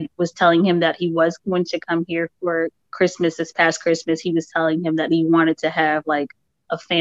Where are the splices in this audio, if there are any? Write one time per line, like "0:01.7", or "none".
none